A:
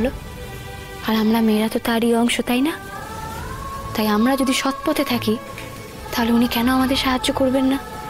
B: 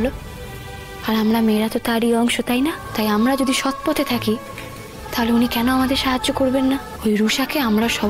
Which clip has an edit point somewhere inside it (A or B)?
B